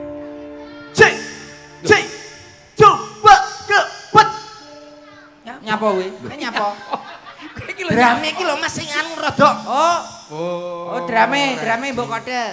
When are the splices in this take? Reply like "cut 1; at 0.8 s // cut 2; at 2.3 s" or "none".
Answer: none